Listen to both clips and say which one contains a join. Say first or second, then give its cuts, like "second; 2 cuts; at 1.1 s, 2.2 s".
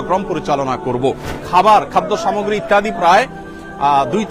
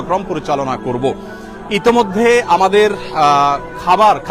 first; 1 cut; at 1.3 s